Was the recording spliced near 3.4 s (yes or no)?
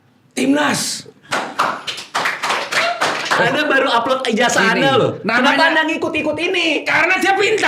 yes